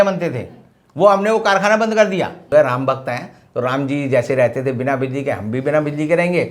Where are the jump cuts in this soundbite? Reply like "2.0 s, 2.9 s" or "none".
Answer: 2.4 s